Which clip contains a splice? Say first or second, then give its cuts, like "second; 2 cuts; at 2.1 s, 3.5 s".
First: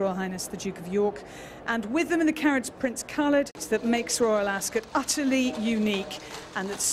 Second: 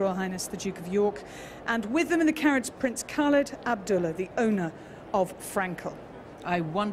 second; 1 cut; at 3.6 s